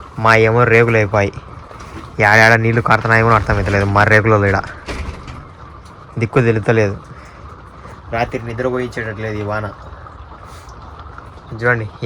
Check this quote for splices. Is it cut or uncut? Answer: uncut